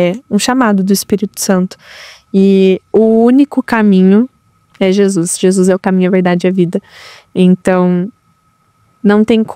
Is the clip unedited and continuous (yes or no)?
yes